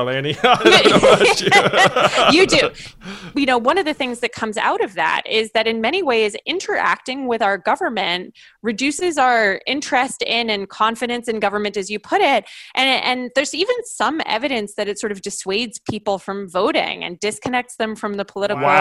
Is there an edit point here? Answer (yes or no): yes